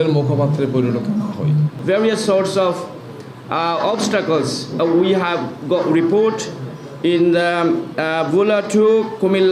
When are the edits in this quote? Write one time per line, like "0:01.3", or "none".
0:01.7
0:04.7